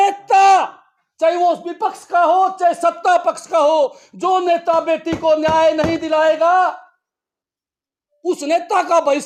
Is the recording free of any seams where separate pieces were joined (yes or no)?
yes